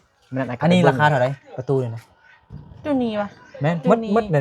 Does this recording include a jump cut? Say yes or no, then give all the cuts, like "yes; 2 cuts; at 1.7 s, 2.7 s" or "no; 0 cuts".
no; 0 cuts